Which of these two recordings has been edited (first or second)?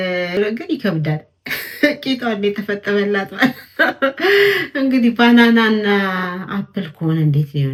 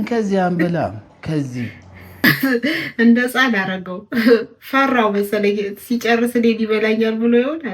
second